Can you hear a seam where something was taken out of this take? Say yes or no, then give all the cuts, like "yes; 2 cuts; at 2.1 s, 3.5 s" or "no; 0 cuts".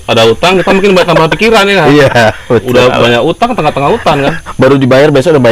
no; 0 cuts